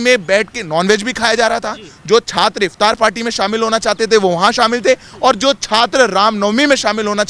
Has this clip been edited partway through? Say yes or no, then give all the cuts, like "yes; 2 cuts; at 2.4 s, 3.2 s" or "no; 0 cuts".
no; 0 cuts